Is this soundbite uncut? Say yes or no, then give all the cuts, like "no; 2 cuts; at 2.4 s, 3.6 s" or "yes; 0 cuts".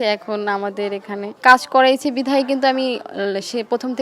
no; 1 cut; at 1.4 s